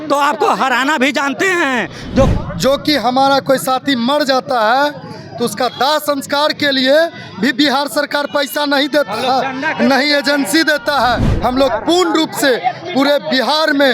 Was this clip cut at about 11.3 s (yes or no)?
yes